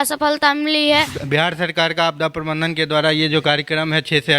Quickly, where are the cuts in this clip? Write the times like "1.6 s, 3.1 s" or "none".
1.2 s